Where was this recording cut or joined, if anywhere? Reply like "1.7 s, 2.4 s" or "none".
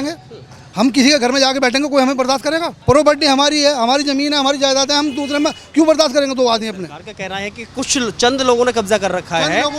2.7 s